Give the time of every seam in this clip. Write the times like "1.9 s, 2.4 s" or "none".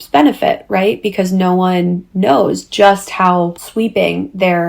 3.6 s